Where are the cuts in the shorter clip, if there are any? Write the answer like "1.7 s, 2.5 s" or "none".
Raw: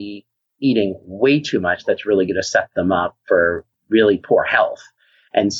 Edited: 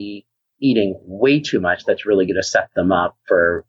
none